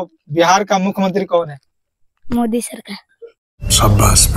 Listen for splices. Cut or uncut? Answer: cut